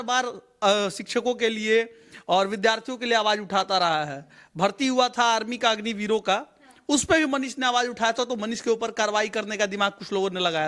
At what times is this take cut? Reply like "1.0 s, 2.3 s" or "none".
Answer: none

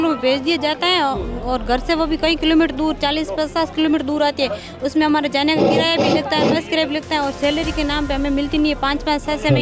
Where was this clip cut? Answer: none

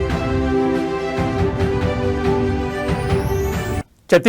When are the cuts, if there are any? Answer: 3.3 s

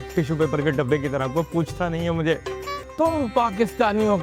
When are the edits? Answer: 2.8 s

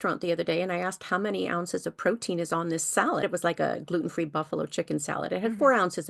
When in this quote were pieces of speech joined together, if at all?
3.2 s

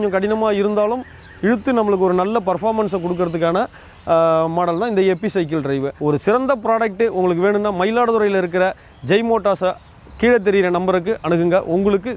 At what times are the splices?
5.9 s

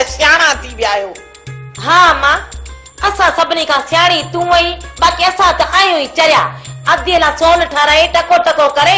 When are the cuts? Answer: 2.9 s

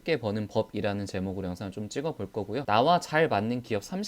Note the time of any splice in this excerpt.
2.6 s

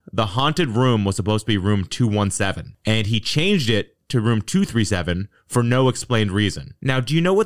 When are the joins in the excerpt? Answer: none

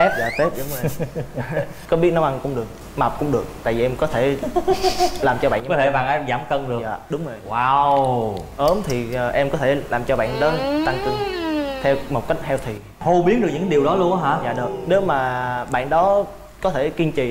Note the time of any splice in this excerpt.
none

